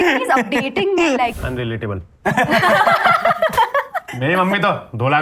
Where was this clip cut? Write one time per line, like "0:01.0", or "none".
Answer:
0:01.4
0:04.0